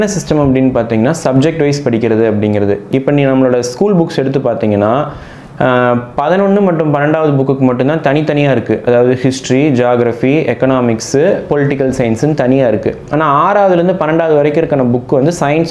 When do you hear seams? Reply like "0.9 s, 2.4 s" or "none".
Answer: none